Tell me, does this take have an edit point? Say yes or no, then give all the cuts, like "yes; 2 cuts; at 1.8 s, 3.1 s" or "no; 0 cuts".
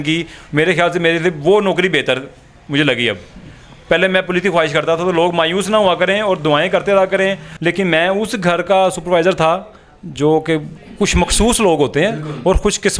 yes; 1 cut; at 7.5 s